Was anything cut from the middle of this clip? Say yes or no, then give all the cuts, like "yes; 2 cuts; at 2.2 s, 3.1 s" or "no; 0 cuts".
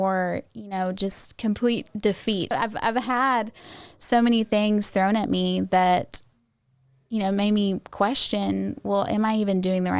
yes; 1 cut; at 2.5 s